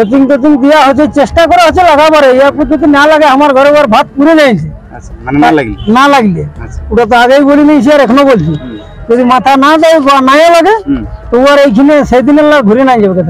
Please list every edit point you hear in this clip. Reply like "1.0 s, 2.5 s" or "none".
none